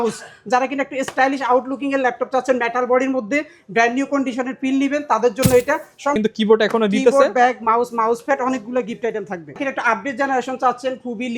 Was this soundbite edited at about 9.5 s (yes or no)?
yes